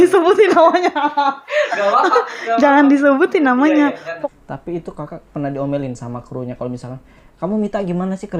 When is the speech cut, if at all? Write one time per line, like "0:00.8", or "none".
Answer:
0:04.1